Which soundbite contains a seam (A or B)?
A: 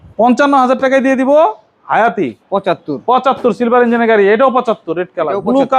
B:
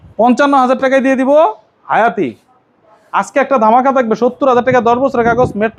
A